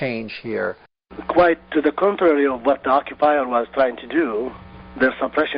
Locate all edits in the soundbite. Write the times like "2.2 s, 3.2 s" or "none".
1.2 s